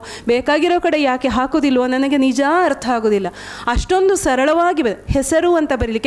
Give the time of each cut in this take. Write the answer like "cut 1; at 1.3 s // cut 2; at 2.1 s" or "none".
none

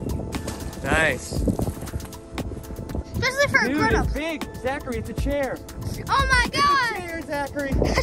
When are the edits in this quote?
cut 1; at 3.0 s

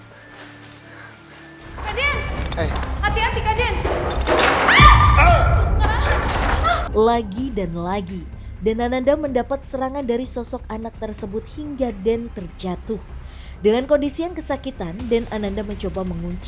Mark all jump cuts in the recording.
cut 1; at 1.7 s

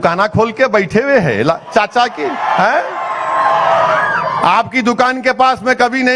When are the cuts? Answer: none

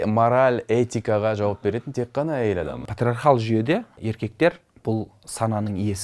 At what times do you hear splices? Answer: cut 1; at 2.8 s // cut 2; at 4.0 s

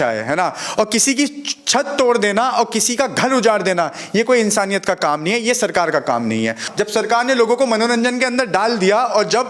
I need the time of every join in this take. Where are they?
cut 1; at 6.6 s

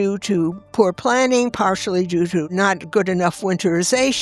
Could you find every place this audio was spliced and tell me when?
cut 1; at 2.4 s

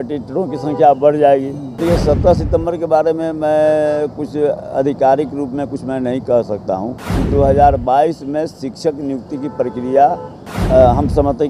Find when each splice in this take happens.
cut 1; at 1.7 s // cut 2; at 6.9 s

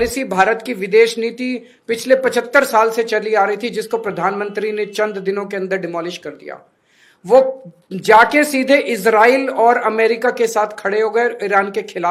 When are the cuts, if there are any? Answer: none

